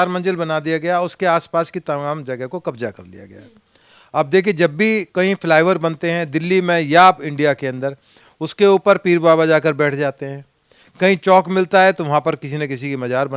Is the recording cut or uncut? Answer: uncut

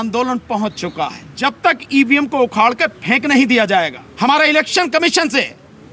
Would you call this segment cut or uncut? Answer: cut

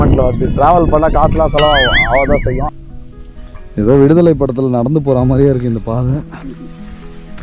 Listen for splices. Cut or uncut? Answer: cut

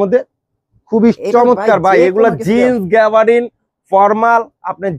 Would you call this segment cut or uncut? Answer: uncut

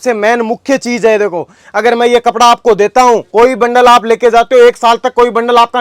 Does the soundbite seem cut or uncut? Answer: uncut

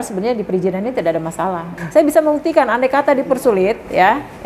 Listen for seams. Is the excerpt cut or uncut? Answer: cut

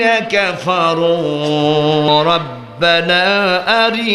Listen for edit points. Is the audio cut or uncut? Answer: cut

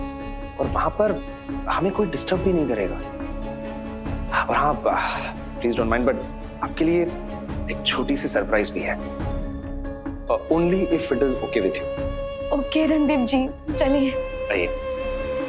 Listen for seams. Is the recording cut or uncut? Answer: cut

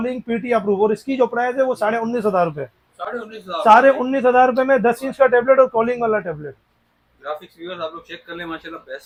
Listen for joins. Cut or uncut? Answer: uncut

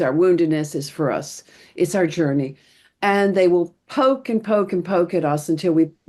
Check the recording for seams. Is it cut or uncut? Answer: uncut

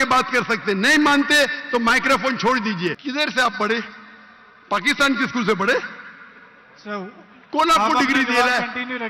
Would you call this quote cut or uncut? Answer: cut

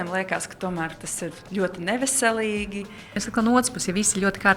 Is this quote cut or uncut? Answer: cut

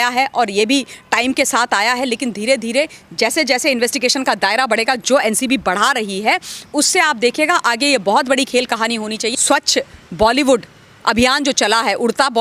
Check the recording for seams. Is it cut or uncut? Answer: cut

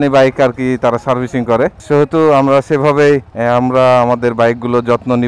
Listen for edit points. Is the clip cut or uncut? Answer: cut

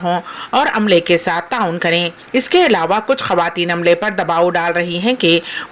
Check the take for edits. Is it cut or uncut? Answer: cut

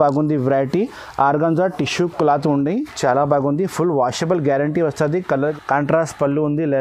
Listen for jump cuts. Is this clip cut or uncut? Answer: cut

